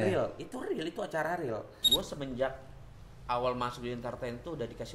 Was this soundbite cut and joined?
yes; 1 cut; at 1.8 s

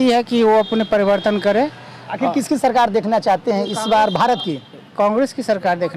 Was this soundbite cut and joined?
no; 0 cuts

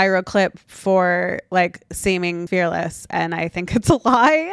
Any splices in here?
yes; 1 cut; at 2.4 s

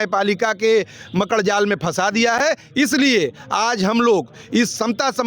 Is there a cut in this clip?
no; 0 cuts

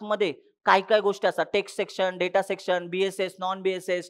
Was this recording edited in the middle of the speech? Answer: no; 0 cuts

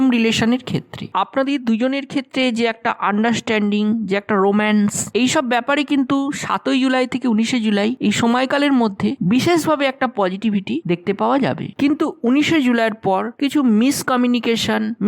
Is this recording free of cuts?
yes; 0 cuts

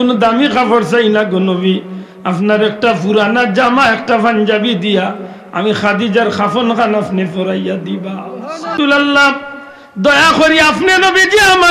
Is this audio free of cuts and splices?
no; 1 cut; at 8.7 s

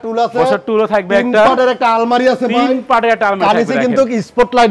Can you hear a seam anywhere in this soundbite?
no; 0 cuts

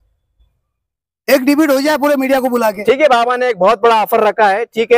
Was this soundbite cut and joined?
no; 0 cuts

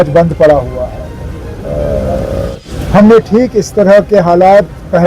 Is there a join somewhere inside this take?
yes; 1 cut; at 2.6 s

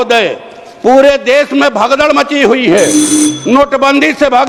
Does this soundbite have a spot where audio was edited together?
no; 0 cuts

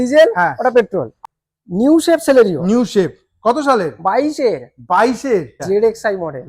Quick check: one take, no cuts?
no; 2 cuts; at 1.1 s, 5.6 s

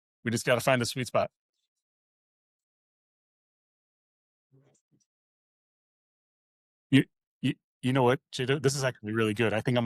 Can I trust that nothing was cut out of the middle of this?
yes; 0 cuts

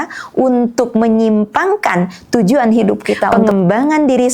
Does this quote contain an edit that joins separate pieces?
yes; 1 cut; at 3.3 s

